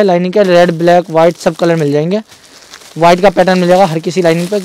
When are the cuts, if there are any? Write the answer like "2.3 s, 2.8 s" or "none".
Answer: none